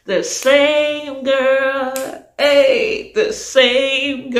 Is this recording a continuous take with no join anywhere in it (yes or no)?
yes